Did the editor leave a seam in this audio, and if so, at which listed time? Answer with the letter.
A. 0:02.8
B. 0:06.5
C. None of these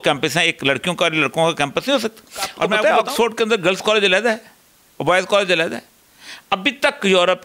A